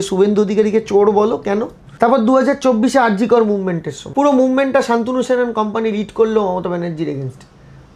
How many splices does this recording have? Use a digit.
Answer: 2